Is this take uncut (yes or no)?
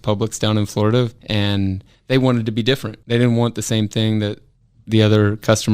no